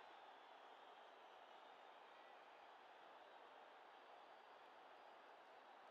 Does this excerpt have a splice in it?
no; 0 cuts

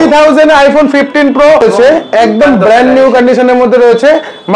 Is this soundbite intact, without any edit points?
no; 1 cut; at 2.0 s

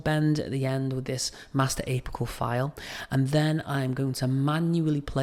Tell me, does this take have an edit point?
no; 0 cuts

